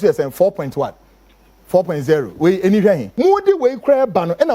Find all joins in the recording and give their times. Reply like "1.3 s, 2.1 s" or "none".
3.1 s